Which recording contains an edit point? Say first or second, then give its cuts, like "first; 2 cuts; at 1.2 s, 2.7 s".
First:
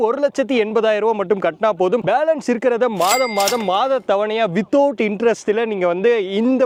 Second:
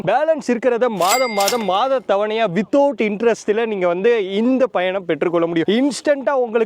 second; 1 cut; at 5.7 s